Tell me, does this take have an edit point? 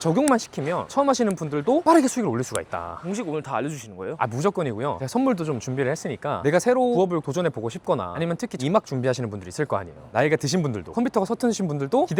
no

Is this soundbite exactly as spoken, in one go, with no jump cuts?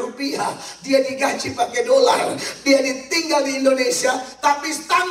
yes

